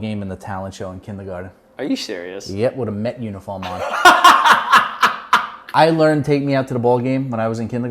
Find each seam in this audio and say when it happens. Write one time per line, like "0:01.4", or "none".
0:05.6